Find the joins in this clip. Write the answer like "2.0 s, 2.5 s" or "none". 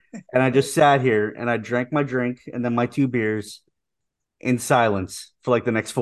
none